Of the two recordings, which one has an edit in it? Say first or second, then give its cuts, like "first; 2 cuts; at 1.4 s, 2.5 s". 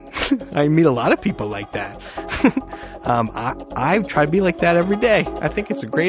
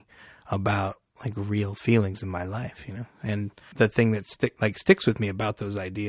second; 1 cut; at 3.6 s